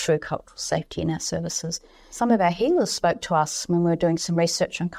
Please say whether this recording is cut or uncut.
uncut